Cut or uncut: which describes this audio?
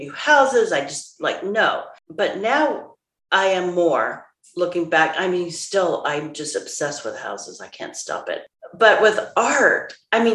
uncut